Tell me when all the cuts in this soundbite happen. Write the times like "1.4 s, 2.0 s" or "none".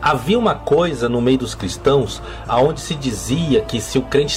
none